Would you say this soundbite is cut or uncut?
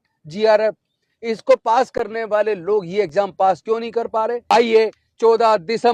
cut